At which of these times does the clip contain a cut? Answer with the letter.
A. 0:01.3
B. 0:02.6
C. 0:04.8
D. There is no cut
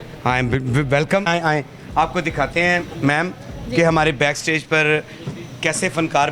A